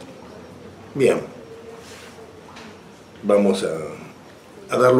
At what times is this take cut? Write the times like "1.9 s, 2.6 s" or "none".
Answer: none